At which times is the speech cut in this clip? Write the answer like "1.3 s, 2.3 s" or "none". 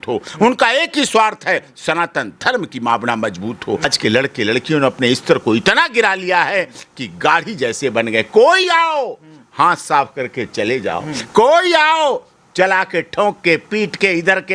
3.8 s